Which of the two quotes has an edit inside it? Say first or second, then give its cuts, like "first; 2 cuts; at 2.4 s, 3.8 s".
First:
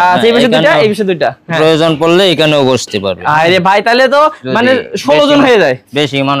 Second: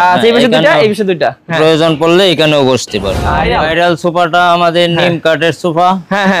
second; 1 cut; at 3.4 s